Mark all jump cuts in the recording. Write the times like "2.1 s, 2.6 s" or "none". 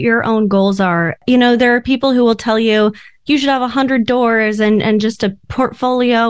1.2 s